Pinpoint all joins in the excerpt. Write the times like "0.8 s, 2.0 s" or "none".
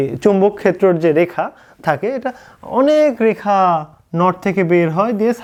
none